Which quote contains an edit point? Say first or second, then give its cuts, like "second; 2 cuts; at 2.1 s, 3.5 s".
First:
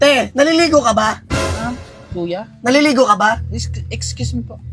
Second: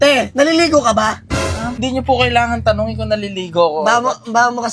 second; 1 cut; at 1.8 s